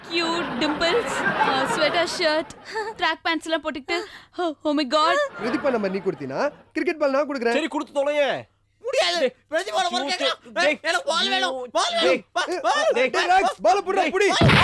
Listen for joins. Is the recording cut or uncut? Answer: cut